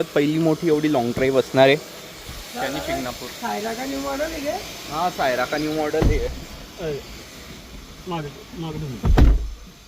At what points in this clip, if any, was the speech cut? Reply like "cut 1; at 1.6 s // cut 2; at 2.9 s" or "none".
none